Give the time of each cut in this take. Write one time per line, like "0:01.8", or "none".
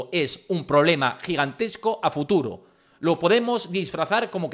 none